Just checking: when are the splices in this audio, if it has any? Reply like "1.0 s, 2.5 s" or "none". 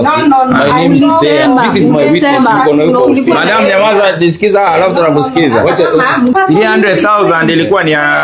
6.3 s